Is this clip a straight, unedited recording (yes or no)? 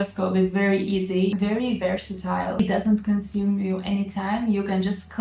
no